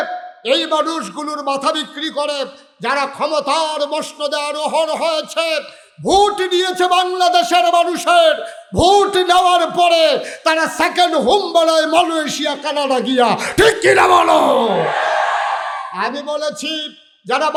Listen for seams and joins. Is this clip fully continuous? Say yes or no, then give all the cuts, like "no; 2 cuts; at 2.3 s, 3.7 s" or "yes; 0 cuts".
yes; 0 cuts